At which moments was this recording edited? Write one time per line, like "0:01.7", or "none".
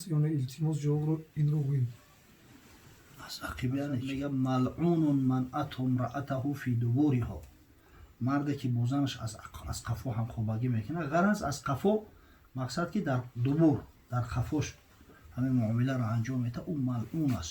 0:04.1